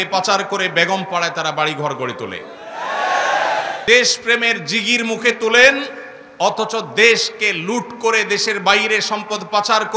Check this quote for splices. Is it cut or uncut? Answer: cut